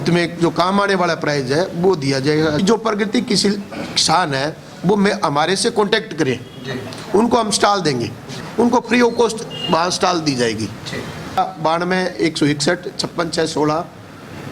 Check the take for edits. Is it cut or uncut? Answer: cut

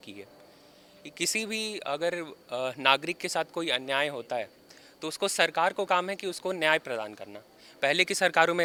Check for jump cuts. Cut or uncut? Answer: uncut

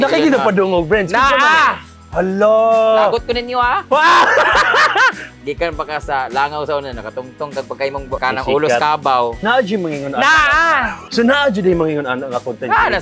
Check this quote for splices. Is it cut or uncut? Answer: cut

